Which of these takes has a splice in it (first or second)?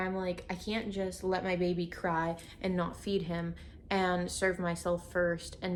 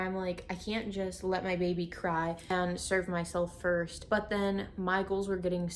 second